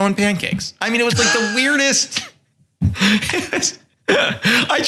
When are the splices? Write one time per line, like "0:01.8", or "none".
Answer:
none